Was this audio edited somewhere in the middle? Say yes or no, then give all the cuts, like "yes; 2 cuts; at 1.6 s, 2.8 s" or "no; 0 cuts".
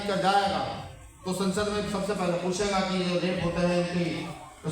no; 0 cuts